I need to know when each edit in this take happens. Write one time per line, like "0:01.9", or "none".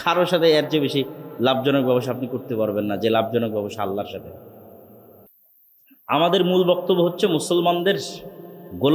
0:05.3